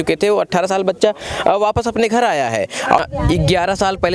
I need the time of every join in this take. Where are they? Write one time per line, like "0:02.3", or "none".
0:03.0

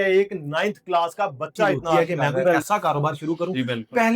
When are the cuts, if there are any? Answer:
0:02.6

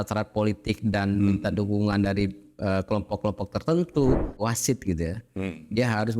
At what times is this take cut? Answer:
0:04.4

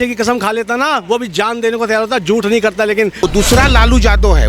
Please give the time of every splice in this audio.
0:03.2

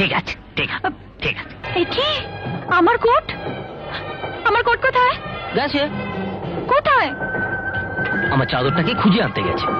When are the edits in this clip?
0:01.6

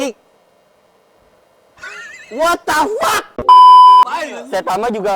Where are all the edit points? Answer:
0:04.0

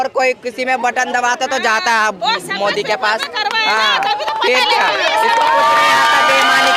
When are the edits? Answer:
none

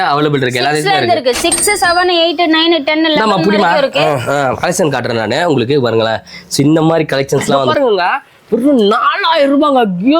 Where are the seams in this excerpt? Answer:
0:07.6

